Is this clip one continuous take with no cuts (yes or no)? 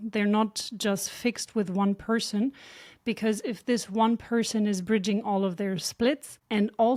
yes